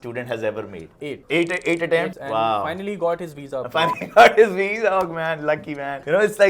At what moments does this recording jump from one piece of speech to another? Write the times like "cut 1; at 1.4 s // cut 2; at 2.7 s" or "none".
none